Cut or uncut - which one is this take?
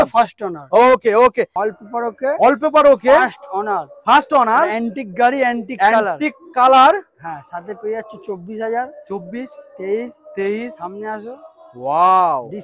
cut